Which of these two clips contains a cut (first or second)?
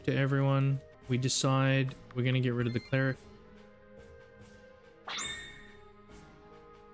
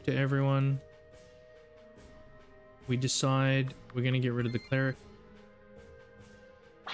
first